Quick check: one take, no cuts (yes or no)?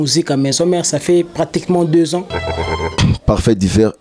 no